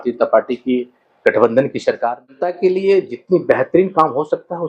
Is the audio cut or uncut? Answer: cut